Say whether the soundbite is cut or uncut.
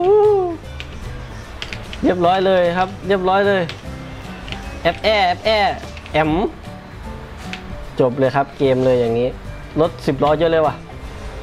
cut